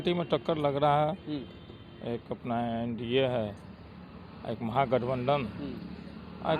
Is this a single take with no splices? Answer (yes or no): yes